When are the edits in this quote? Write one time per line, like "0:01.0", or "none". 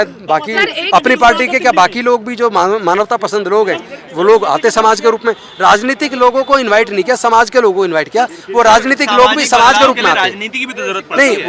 none